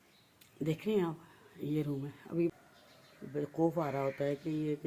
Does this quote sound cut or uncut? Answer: cut